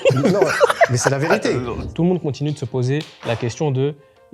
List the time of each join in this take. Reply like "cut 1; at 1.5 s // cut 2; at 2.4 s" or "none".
cut 1; at 1.8 s